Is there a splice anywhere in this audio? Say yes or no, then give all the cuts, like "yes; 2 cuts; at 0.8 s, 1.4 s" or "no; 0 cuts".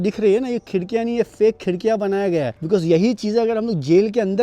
no; 0 cuts